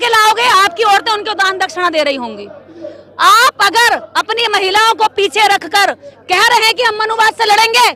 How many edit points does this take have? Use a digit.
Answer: 0